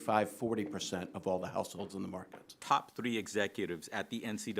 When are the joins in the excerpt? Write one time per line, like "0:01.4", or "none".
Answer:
0:02.6